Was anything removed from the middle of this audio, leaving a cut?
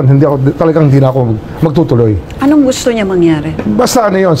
no; 0 cuts

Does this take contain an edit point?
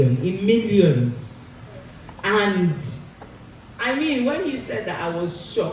no; 0 cuts

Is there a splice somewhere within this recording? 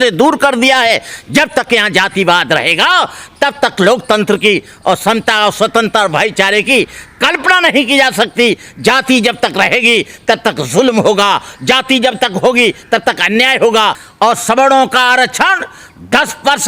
yes; 1 cut; at 14.0 s

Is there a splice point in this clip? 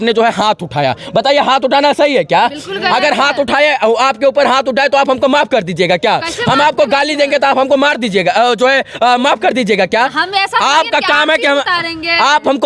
no; 0 cuts

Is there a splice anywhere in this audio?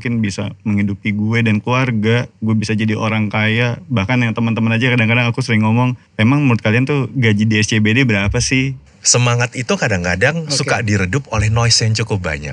yes; 3 cuts; at 2.3 s, 6.0 s, 8.8 s

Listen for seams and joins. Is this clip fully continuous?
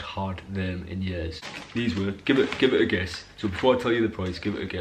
no; 1 cut; at 1.5 s

